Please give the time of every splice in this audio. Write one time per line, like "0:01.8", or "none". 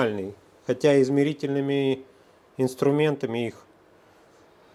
none